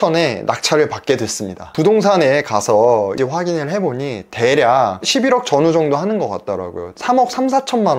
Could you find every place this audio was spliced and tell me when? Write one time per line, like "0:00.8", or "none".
0:01.7
0:03.2

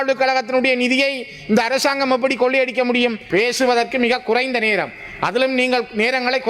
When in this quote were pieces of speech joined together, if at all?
0:03.2

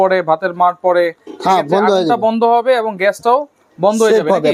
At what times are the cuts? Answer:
none

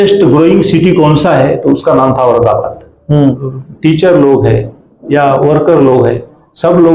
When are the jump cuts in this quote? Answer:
0:03.4

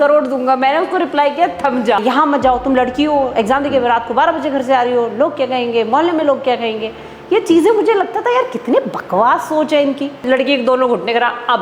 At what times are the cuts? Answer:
0:02.0
0:10.2

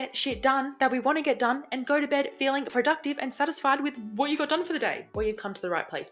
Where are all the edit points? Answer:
0:05.0

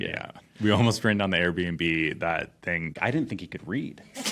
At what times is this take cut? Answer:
0:02.9

